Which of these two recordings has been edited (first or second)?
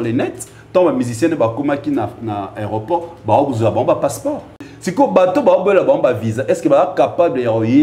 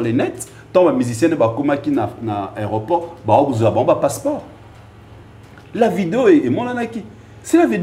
first